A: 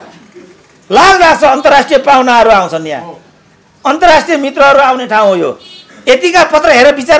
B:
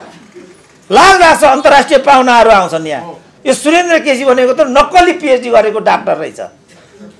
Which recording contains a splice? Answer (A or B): B